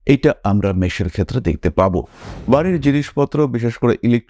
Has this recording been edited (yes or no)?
yes